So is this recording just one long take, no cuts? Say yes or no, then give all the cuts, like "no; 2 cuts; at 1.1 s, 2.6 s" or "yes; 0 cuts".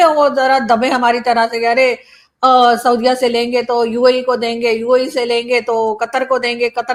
yes; 0 cuts